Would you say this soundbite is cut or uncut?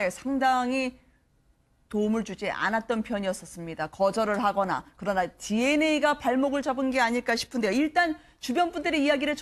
uncut